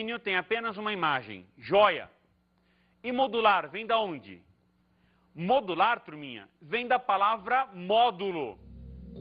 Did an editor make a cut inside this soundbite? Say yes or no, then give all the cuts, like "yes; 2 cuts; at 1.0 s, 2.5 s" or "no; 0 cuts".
yes; 1 cut; at 3.3 s